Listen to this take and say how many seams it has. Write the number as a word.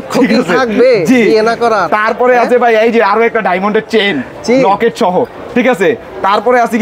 zero